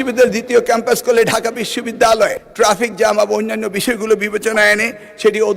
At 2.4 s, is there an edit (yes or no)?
yes